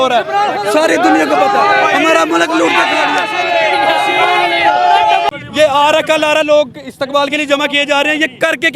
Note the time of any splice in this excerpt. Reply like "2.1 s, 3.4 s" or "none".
5.3 s